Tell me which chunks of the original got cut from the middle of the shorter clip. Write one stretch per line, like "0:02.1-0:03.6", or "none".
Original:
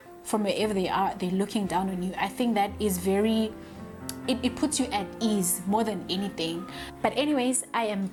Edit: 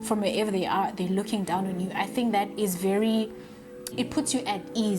0:04.2-0:04.4

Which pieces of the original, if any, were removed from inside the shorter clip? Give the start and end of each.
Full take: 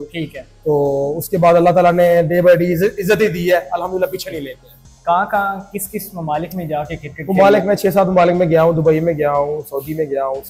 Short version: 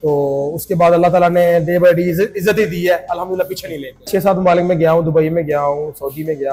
0:04.7-0:07.8

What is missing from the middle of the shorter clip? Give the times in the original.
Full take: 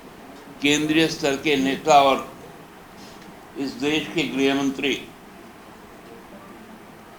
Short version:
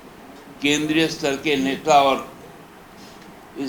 none

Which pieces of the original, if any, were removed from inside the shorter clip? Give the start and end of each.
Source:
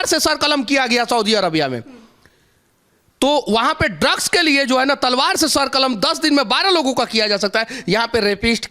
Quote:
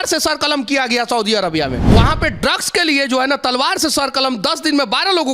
0:01.9-0:03.5

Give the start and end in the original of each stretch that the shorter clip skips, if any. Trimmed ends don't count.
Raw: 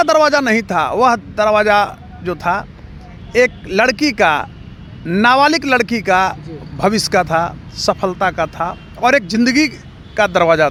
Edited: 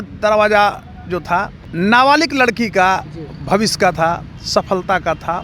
0:02.8-0:04.9

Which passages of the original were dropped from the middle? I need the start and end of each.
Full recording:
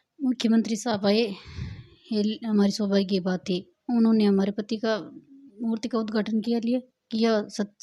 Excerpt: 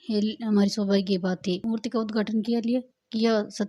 0:03.6-0:05.6

